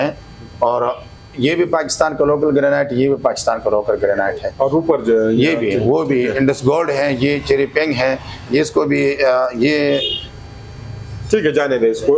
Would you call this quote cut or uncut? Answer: uncut